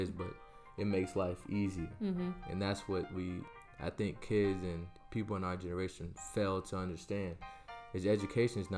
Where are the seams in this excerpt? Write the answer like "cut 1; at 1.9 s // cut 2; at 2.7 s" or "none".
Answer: cut 1; at 3.5 s // cut 2; at 5.0 s